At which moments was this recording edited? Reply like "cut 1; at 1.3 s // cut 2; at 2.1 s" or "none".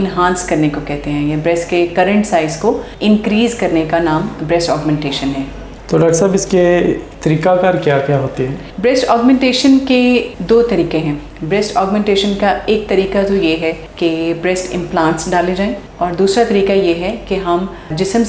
none